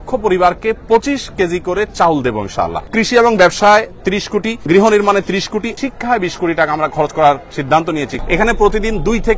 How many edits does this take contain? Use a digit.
4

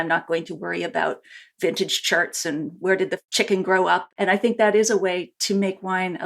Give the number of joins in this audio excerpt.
2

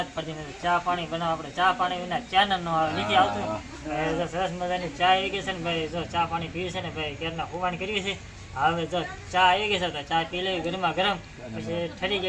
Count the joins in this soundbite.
0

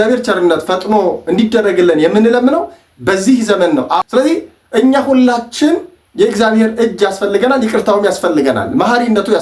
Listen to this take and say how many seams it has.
1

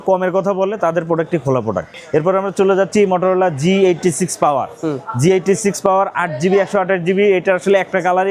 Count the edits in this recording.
0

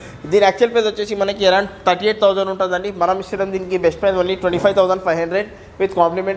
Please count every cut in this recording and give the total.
0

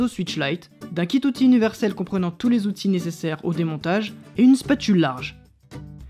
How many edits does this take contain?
1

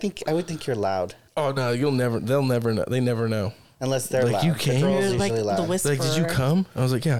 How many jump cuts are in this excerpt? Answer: 2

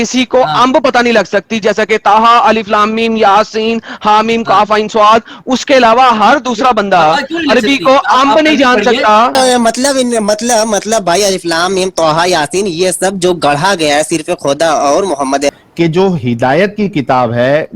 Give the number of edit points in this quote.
2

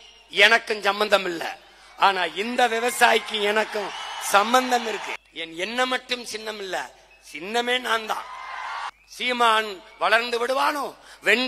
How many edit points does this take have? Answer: 2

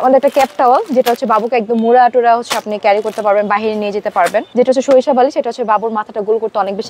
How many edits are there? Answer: 1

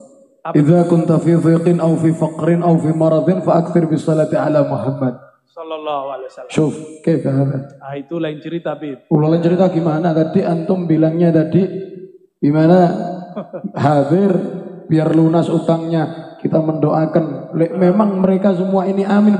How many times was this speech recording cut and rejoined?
0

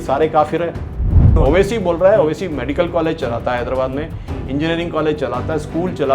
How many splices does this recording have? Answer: 1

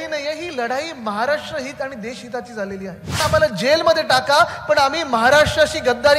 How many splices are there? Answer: 1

